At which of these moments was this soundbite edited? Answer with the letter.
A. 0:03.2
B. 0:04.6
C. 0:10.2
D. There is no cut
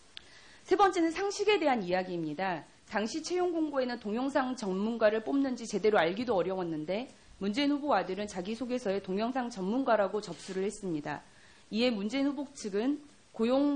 A